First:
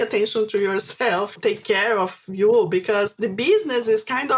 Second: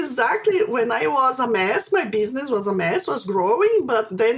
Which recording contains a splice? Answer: first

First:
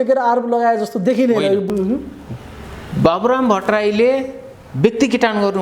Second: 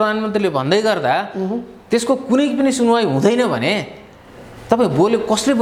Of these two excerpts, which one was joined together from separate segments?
first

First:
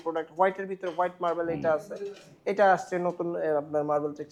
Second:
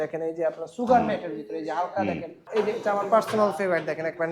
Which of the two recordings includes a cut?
second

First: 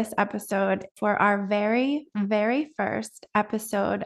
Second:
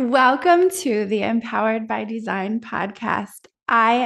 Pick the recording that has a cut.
first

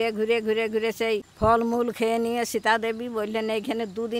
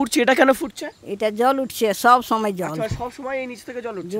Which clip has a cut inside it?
first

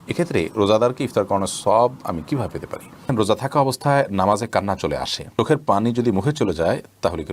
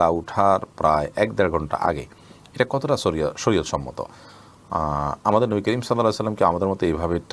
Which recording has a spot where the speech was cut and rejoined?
first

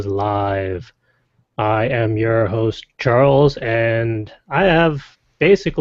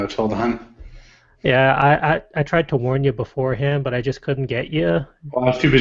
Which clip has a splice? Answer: second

